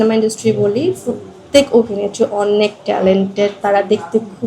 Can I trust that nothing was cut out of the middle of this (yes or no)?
yes